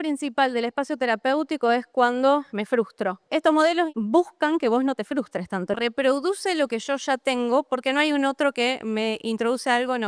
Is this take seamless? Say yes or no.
no